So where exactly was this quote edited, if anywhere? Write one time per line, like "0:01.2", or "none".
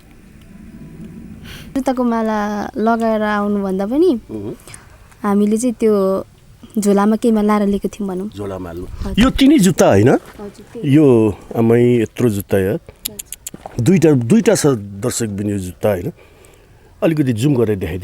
0:01.7